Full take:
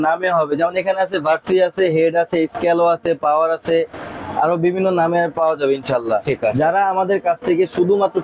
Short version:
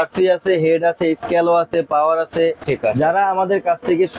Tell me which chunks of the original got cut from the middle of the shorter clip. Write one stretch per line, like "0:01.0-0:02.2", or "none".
0:04.0-0:06.3